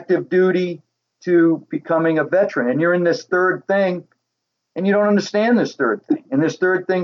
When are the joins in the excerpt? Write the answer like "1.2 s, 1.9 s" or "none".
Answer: none